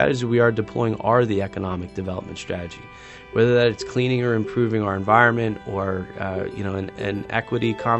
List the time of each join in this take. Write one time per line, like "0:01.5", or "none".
none